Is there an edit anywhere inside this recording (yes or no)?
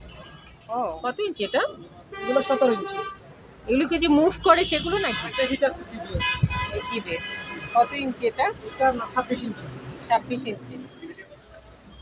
yes